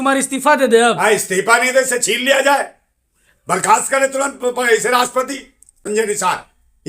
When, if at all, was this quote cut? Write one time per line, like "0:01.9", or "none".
0:05.8

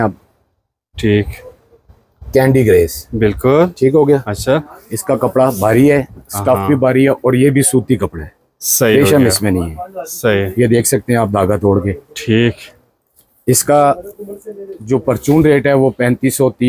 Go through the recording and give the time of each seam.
none

